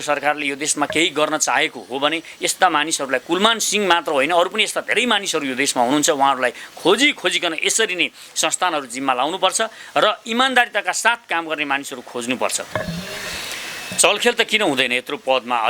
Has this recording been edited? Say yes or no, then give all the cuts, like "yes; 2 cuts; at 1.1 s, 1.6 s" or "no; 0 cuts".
yes; 1 cut; at 12.7 s